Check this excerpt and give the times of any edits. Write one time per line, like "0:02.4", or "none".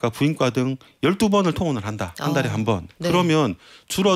none